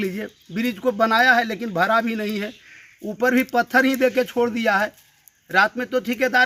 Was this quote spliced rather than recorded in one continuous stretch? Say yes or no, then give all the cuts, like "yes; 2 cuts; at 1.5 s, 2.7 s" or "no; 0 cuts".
no; 0 cuts